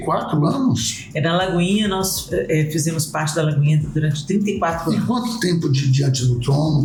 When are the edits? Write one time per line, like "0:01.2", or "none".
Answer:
none